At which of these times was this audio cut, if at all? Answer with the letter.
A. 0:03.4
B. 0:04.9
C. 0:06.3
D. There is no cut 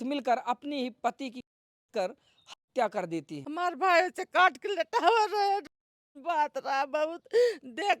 A